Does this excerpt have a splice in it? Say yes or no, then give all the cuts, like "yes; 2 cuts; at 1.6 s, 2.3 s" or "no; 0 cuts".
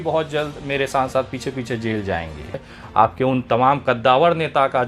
yes; 1 cut; at 2.8 s